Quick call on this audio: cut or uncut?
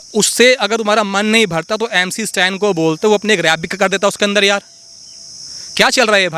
uncut